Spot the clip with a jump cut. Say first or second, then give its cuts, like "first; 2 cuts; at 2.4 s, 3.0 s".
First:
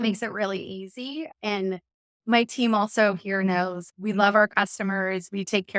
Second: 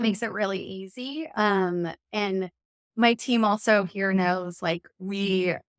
first; 2 cuts; at 1.3 s, 3.8 s